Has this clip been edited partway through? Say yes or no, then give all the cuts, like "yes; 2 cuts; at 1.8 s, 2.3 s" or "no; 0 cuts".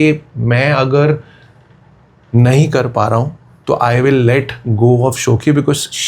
no; 0 cuts